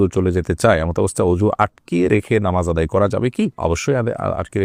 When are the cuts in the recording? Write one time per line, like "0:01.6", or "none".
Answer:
none